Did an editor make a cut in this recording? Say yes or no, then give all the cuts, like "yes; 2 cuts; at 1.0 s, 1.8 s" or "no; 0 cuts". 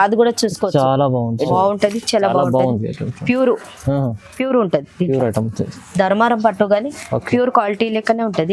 yes; 1 cut; at 1.5 s